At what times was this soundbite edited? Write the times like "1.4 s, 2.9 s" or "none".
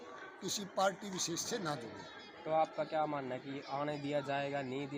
none